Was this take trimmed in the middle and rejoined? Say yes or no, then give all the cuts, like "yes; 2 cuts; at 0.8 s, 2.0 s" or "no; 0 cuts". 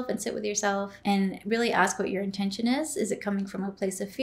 yes; 1 cut; at 0.9 s